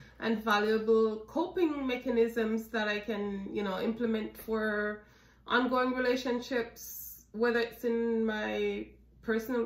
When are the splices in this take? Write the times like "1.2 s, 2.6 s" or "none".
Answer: none